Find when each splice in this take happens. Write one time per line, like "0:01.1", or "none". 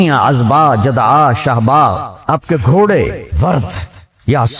0:02.1
0:03.3